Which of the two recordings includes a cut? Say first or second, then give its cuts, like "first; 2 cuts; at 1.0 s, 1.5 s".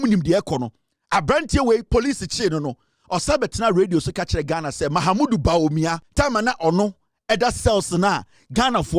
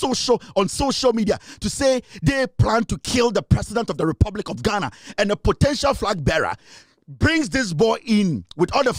first; 1 cut; at 6.0 s